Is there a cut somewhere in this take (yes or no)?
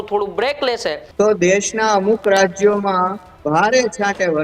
yes